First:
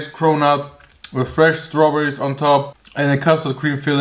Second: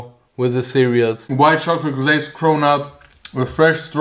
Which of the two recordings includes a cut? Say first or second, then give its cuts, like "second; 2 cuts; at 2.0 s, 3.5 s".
second; 1 cut; at 1.2 s